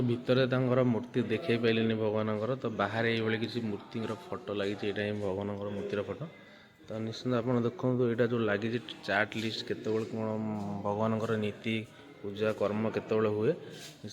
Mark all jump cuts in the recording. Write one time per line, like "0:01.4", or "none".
none